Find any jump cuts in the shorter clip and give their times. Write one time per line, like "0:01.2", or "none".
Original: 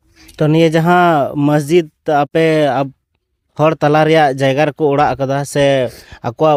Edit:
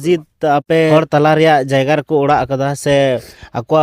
0:00.9